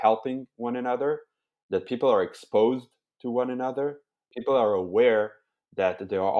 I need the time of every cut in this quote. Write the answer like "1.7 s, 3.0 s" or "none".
4.2 s